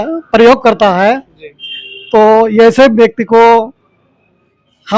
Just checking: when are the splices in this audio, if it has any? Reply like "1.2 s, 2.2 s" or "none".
none